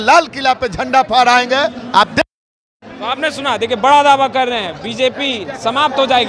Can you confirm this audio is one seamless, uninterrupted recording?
yes; 0 cuts

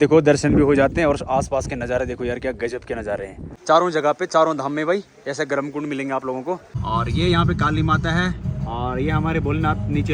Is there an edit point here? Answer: yes; 2 cuts; at 3.5 s, 6.7 s

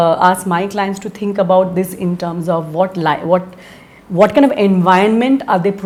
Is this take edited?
no; 0 cuts

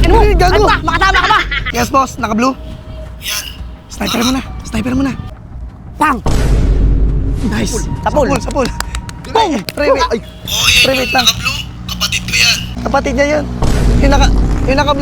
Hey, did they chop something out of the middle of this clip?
yes; 4 cuts; at 1.6 s, 5.3 s, 9.7 s, 12.7 s

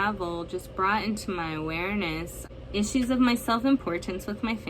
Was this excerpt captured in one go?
no; 1 cut; at 2.6 s

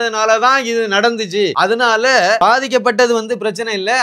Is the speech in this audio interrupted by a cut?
yes; 2 cuts; at 1.5 s, 2.4 s

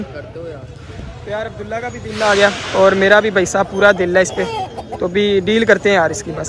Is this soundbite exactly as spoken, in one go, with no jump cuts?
yes; 0 cuts

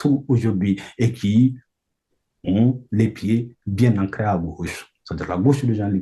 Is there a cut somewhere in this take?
no; 0 cuts

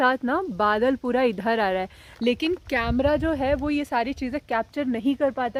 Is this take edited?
no; 0 cuts

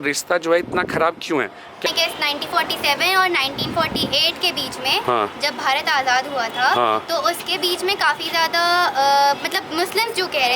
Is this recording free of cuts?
no; 1 cut; at 1.9 s

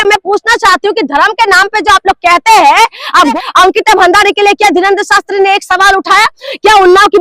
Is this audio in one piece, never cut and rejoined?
no; 1 cut; at 3.3 s

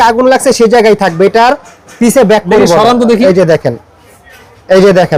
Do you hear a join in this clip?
no; 0 cuts

